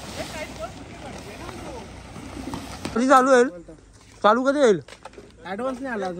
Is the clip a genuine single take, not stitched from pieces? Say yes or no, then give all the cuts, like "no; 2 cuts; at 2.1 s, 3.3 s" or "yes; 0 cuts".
no; 1 cut; at 3.0 s